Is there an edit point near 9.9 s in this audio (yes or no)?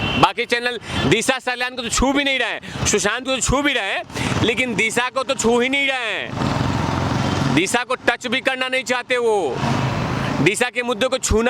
no